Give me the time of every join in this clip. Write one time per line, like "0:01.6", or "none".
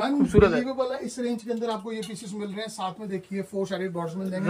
none